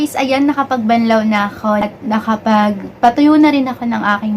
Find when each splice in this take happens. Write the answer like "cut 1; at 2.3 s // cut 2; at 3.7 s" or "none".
cut 1; at 1.9 s